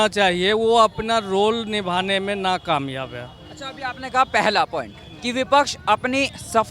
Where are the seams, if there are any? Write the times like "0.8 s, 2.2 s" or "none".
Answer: none